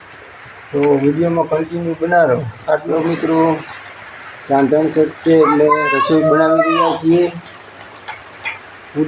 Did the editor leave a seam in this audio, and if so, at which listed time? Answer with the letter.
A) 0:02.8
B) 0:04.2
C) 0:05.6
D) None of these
A